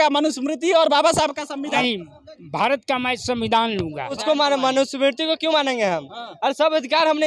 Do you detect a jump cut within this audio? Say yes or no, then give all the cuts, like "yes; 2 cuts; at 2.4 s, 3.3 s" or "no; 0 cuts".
yes; 2 cuts; at 1.8 s, 4.2 s